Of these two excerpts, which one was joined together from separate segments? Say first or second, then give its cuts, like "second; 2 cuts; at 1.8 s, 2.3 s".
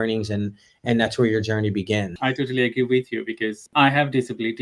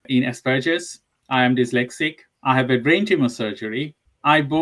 first; 2 cuts; at 2.1 s, 3.6 s